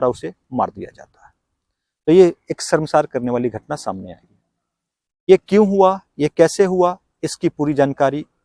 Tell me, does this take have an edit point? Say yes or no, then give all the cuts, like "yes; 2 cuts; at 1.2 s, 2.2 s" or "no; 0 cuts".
no; 0 cuts